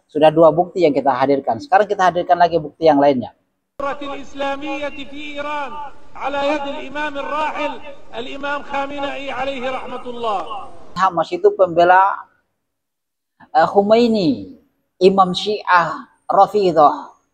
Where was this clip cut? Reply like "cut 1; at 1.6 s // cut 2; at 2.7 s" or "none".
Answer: cut 1; at 3.8 s // cut 2; at 10.9 s